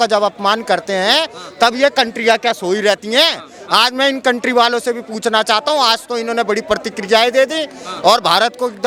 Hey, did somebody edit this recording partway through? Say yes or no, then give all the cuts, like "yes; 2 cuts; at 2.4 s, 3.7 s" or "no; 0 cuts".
no; 0 cuts